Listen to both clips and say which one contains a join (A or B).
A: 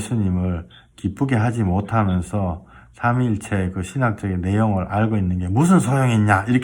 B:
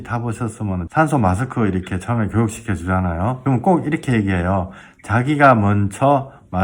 B